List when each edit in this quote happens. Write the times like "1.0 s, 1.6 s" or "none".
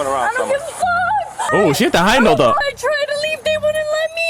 1.5 s, 2.7 s